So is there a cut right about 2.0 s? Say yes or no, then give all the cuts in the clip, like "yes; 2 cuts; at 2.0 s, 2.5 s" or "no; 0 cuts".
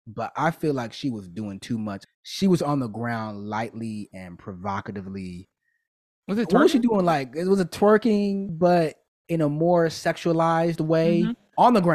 yes; 2 cuts; at 2.0 s, 8.5 s